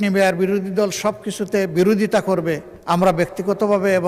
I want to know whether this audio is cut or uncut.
cut